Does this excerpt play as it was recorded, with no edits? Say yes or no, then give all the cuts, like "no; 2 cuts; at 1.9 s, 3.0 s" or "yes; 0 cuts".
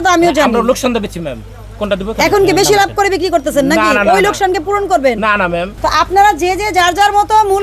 no; 1 cut; at 5.7 s